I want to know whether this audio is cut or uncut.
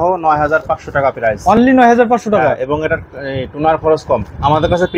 uncut